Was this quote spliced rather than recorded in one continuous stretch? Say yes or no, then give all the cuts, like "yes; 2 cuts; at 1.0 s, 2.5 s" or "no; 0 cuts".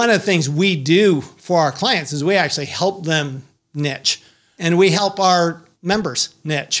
yes; 2 cuts; at 4.5 s, 5.7 s